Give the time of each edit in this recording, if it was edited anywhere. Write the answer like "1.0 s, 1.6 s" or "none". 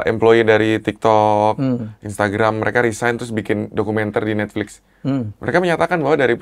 none